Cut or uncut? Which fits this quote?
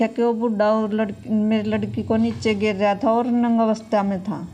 uncut